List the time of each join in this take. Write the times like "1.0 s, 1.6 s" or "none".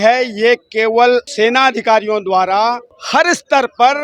1.3 s, 2.9 s